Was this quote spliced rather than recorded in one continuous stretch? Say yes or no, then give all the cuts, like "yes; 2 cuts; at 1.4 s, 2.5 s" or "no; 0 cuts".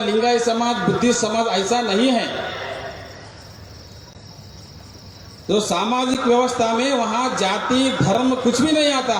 no; 0 cuts